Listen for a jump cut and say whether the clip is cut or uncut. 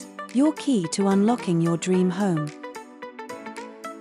cut